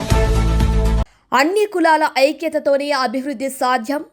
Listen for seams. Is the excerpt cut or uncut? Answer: uncut